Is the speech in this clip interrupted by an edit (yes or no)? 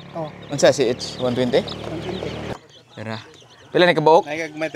yes